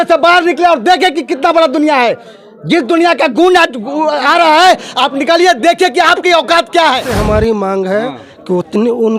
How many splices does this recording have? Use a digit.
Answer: 1